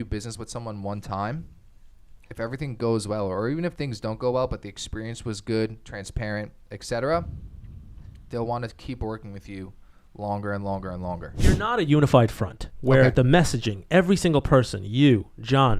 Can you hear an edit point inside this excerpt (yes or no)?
yes